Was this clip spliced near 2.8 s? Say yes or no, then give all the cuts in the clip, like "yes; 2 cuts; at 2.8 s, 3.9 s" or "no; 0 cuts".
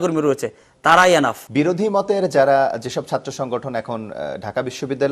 no; 1 cut; at 1.4 s